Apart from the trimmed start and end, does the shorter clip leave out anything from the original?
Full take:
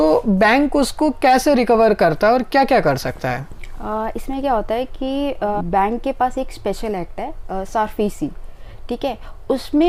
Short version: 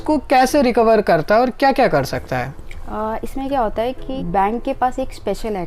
yes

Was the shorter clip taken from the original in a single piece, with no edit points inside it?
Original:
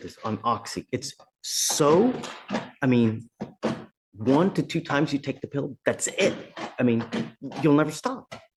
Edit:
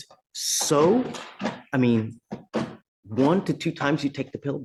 yes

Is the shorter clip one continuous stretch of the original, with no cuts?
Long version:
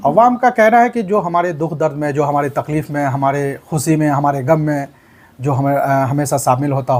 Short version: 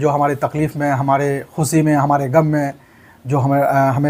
yes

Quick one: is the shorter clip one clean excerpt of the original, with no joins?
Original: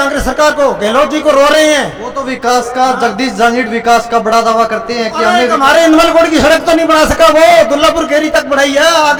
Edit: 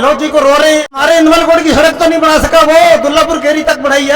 no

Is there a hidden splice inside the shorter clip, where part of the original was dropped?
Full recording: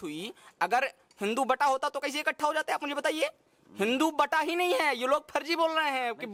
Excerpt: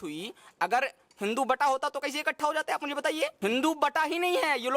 yes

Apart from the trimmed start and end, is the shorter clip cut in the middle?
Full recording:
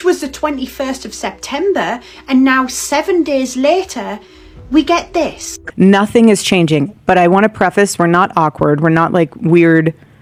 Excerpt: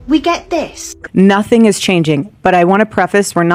no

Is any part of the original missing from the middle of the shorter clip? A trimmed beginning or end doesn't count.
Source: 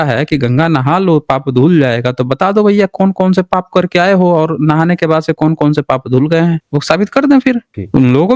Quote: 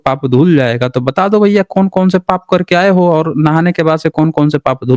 no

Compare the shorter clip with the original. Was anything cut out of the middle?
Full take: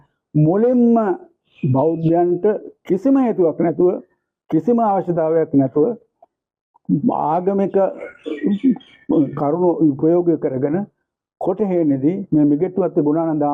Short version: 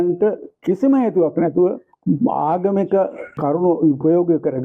yes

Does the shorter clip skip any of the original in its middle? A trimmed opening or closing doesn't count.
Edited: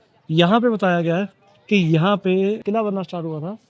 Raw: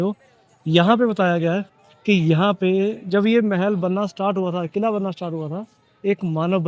yes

